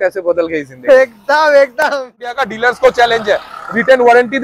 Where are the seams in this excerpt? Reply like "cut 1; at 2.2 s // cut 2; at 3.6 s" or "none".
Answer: cut 1; at 2.4 s